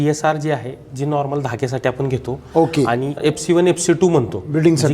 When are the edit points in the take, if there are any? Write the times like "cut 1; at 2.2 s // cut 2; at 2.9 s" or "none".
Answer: cut 1; at 3.2 s